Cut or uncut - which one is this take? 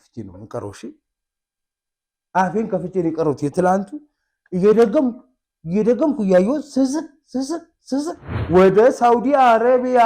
cut